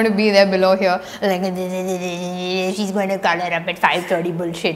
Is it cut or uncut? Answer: uncut